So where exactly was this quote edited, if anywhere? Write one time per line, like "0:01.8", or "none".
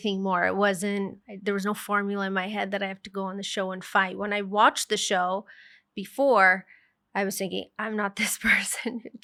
none